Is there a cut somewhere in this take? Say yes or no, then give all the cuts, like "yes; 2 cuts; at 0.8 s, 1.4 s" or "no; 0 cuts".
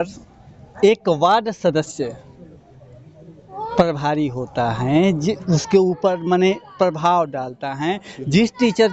no; 0 cuts